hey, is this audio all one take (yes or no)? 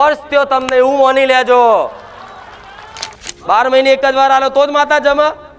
no